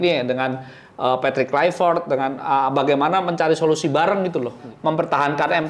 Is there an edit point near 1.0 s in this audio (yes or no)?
no